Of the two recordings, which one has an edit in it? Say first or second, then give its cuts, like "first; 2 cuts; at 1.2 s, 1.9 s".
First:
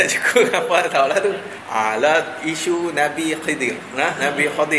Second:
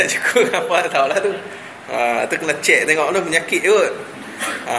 first; 1 cut; at 1.5 s